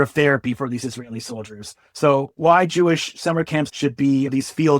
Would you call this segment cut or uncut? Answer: cut